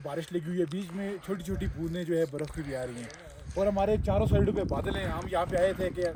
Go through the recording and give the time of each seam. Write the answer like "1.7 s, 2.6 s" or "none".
none